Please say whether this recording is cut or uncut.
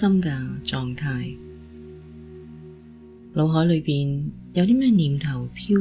cut